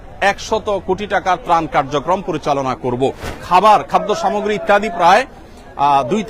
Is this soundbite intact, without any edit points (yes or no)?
no